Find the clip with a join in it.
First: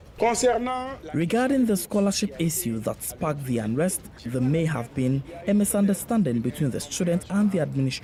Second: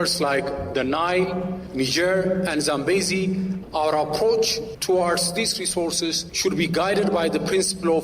second; 4 cuts; at 1.6 s, 3.6 s, 4.7 s, 6.3 s

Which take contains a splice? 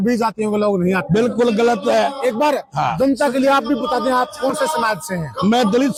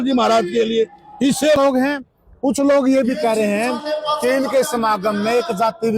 second; 1 cut; at 1.6 s

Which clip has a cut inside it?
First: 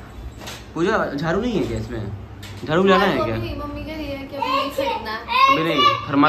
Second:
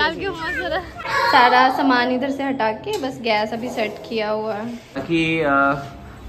second; 2 cuts; at 1.0 s, 5.0 s

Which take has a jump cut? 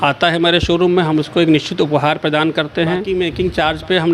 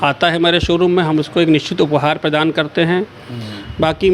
first; 1 cut; at 3.0 s

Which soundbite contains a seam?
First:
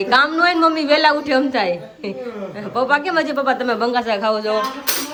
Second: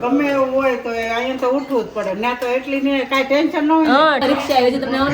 second; 1 cut; at 4.2 s

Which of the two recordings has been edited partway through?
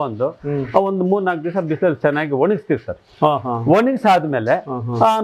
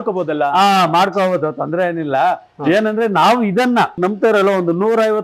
second; 1 cut; at 4.0 s

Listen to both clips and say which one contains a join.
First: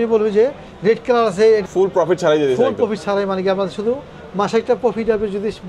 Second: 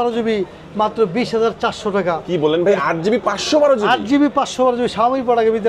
first; 1 cut; at 1.6 s

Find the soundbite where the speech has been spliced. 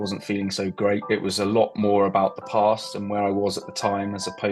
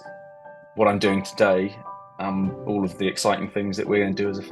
first; 1 cut; at 1.0 s

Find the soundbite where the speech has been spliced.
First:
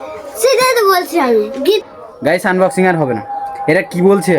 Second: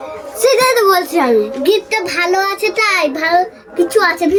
first; 1 cut; at 1.9 s

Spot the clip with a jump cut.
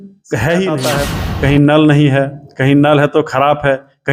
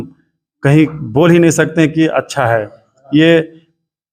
first; 1 cut; at 1.0 s

